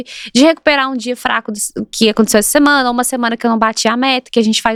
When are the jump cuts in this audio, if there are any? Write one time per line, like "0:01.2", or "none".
none